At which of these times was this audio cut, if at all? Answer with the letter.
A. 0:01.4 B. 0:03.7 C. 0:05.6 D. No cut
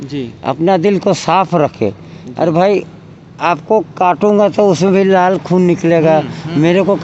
D